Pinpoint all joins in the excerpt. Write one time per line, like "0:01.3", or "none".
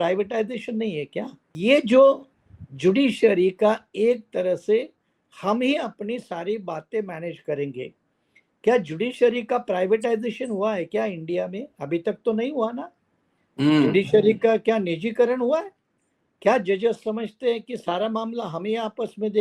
0:01.4